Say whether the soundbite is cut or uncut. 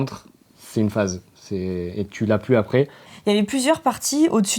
cut